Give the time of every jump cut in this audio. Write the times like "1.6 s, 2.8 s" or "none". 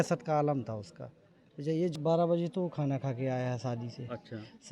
2.0 s